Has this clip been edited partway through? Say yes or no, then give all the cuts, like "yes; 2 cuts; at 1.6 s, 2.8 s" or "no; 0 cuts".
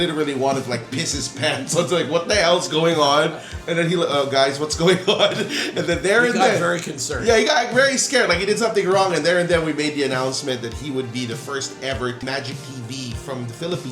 yes; 1 cut; at 12.2 s